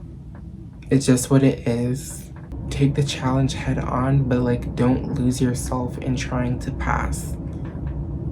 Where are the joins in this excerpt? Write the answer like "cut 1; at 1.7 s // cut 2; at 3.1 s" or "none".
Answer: cut 1; at 2.4 s